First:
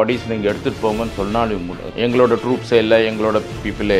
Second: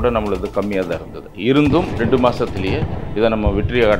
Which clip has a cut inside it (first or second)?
first